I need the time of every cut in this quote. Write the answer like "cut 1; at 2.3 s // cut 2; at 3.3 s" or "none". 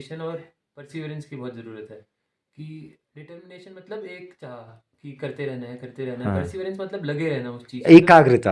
none

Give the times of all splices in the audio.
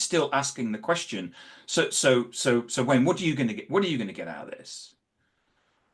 none

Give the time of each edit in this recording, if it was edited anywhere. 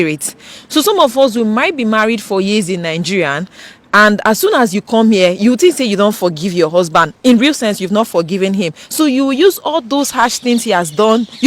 none

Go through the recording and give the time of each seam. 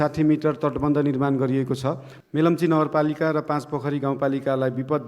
cut 1; at 2.1 s

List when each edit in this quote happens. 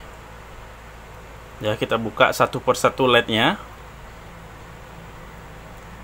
cut 1; at 3.8 s

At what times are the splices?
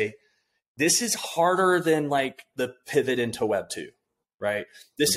none

